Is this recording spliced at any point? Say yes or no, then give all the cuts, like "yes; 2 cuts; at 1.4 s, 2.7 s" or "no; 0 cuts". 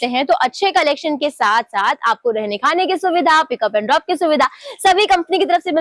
no; 0 cuts